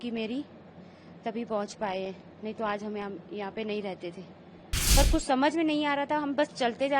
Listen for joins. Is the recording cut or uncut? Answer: cut